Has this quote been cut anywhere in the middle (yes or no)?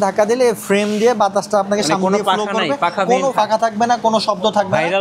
yes